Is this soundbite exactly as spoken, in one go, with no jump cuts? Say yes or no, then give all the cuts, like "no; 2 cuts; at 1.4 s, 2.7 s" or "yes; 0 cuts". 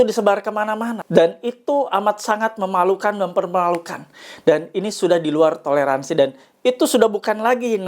no; 1 cut; at 1.0 s